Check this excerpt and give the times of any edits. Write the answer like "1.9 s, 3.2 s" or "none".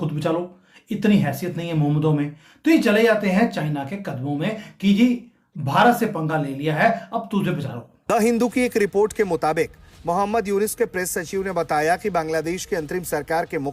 7.9 s